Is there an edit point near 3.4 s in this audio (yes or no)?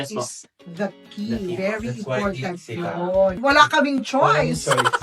yes